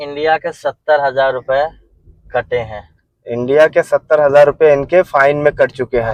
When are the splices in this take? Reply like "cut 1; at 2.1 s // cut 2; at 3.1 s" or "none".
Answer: none